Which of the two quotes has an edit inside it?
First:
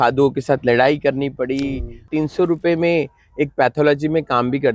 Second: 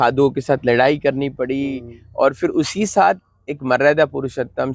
first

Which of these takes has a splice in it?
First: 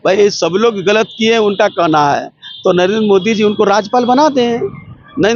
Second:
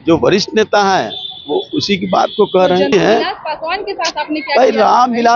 second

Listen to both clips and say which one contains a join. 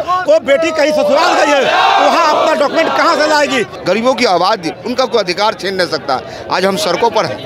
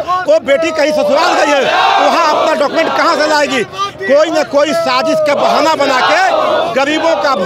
first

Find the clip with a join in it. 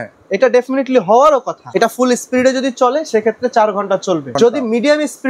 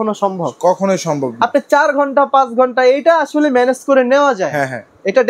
first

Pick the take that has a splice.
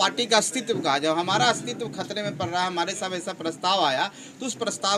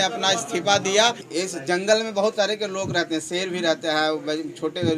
second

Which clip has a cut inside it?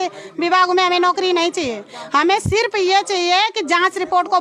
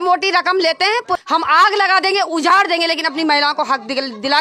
second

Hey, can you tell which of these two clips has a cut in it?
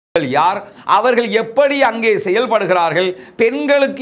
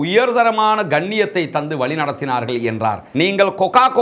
second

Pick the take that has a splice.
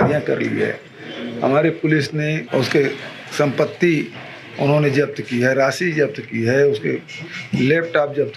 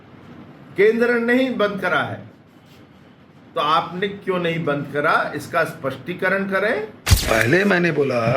second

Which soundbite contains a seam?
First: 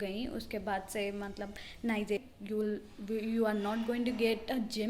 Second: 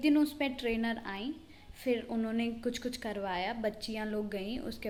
first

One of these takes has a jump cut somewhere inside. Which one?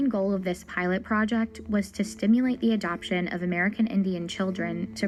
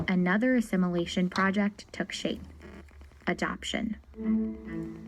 second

